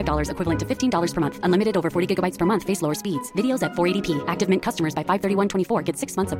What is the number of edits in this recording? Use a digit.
0